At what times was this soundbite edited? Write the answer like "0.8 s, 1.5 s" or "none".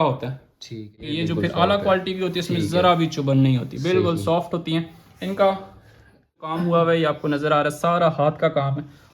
1.0 s, 6.4 s